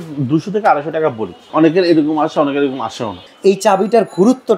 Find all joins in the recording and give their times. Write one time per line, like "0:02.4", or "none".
0:01.5
0:03.3